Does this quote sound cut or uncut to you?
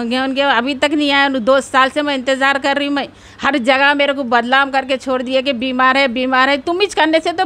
uncut